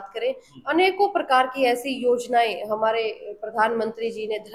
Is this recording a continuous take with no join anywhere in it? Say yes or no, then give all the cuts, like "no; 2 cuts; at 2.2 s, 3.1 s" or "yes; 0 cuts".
yes; 0 cuts